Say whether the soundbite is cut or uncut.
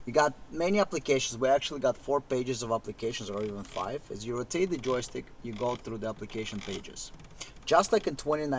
uncut